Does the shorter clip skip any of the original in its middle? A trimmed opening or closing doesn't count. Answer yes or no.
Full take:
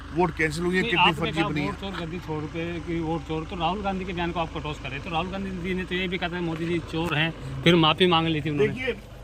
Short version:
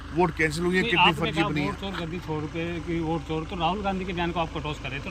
no